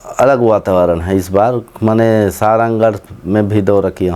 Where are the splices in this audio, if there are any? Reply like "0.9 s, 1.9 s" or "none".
none